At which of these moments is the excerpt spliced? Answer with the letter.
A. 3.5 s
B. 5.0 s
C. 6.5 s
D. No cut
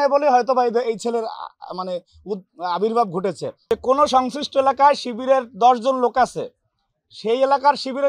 A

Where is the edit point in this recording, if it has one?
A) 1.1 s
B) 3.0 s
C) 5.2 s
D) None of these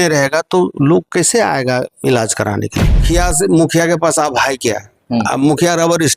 B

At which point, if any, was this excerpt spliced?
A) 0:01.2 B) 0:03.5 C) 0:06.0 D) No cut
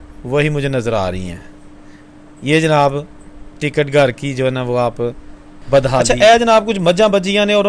C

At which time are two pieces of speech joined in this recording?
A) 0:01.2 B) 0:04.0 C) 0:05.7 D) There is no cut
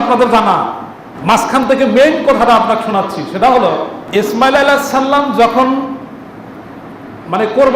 B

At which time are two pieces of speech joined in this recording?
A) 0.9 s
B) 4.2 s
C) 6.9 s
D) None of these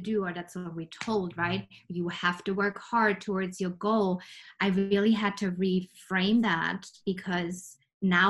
D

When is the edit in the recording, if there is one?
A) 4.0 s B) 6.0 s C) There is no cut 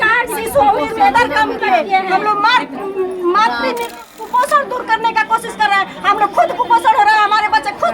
A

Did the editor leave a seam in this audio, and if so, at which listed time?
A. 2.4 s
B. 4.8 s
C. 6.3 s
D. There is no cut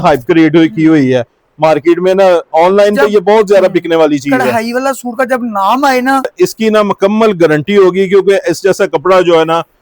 C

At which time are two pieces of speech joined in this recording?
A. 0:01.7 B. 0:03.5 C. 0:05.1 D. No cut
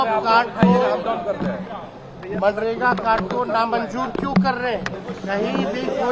C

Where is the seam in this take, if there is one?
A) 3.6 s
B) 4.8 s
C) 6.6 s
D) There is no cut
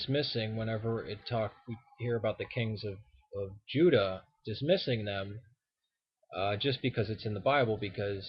B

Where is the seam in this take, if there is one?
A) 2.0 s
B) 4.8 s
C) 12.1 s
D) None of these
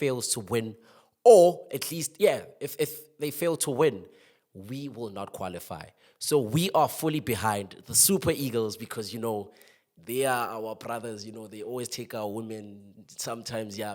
D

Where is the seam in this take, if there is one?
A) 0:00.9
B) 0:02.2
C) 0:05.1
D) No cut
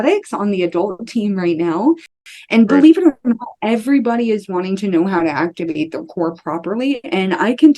B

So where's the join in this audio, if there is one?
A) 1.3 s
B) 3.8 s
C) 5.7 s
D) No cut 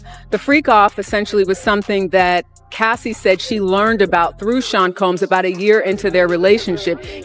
D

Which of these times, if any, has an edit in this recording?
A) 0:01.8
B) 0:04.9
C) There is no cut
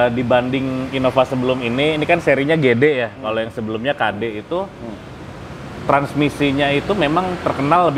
C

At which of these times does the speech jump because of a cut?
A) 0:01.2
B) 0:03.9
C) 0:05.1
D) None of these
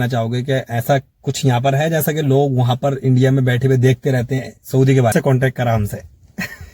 C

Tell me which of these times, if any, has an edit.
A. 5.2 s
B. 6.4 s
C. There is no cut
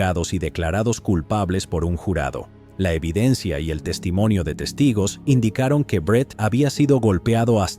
B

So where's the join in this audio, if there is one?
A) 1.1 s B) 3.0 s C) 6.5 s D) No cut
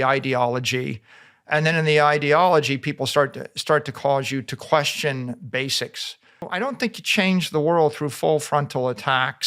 C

